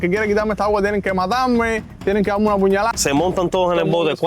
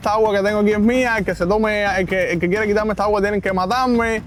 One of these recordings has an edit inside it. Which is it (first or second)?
first